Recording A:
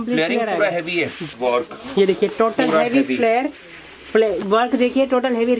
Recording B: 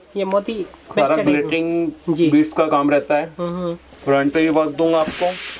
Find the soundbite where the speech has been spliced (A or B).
A